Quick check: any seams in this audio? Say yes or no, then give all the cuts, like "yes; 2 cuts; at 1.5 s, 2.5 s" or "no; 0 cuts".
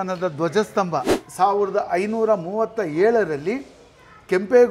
yes; 1 cut; at 1.2 s